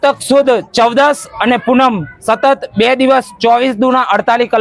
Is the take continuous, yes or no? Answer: yes